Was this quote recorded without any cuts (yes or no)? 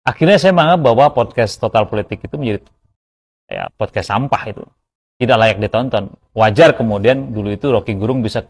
yes